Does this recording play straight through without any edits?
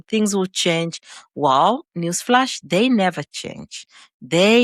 yes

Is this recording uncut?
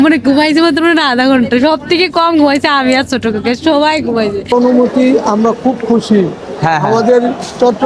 no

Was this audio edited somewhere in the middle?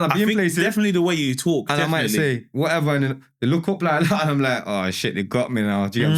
no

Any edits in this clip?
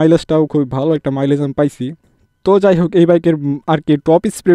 no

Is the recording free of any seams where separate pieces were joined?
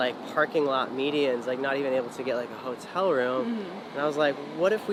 yes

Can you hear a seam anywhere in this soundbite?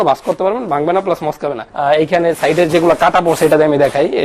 yes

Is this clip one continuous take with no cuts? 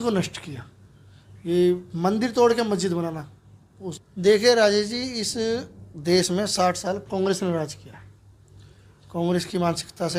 yes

